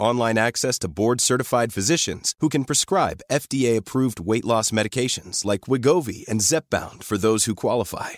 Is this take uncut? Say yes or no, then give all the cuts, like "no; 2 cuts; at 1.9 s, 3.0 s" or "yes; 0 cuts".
yes; 0 cuts